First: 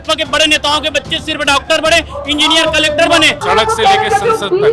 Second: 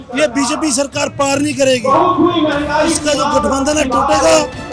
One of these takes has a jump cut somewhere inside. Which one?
first; 1 cut; at 3.4 s

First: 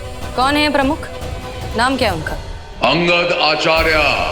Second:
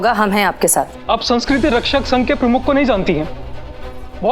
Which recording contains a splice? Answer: second; 1 cut; at 1.0 s

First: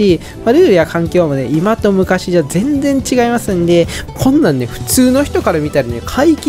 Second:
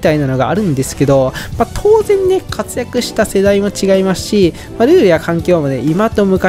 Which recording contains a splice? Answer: first; 1 cut; at 4.0 s

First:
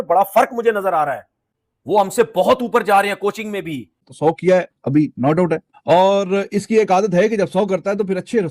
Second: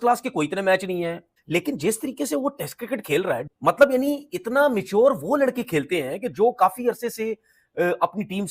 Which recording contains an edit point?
first; 1 cut; at 4.0 s

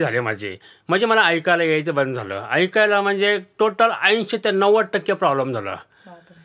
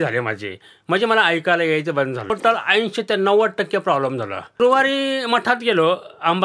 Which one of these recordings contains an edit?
second; 2 cuts; at 2.3 s, 4.6 s

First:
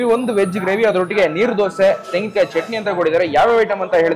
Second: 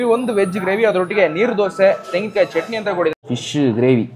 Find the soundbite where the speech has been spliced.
second; 1 cut; at 3.1 s

